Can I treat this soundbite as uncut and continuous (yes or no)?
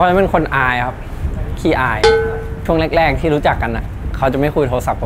yes